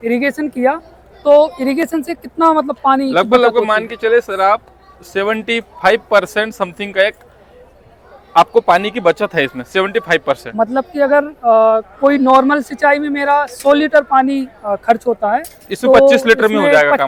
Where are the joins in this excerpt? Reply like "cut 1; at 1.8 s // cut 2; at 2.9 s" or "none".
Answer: none